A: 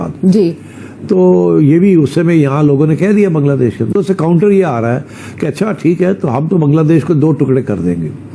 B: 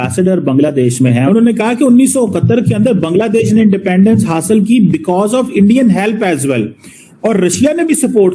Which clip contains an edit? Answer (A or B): A